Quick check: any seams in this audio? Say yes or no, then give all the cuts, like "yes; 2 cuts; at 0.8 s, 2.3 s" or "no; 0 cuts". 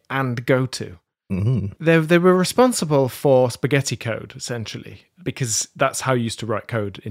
yes; 1 cut; at 1.7 s